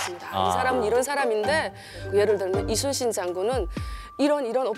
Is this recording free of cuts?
no; 1 cut; at 2.0 s

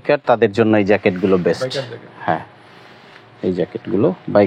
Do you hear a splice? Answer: no; 0 cuts

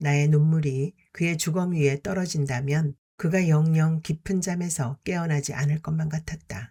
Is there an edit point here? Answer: no; 0 cuts

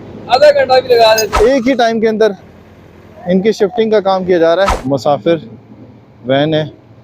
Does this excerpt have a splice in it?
yes; 2 cuts; at 1.3 s, 4.8 s

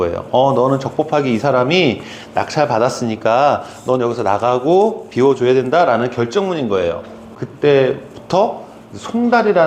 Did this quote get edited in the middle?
no; 0 cuts

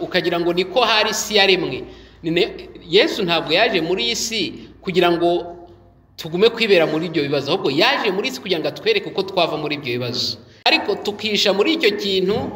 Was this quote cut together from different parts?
yes; 1 cut; at 10.7 s

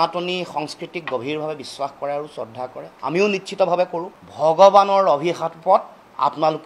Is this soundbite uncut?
no; 1 cut; at 4.3 s

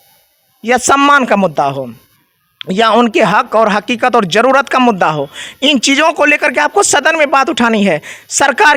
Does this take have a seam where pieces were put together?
no; 0 cuts

